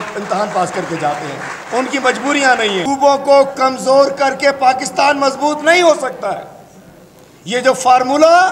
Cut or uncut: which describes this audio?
cut